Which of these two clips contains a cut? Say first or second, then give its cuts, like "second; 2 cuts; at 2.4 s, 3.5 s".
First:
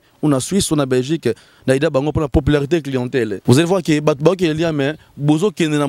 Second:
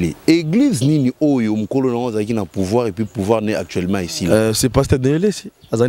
first; 2 cuts; at 2.3 s, 3.4 s